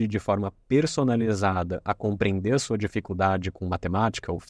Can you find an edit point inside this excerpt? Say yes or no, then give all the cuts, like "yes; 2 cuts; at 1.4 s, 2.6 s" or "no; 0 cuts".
no; 0 cuts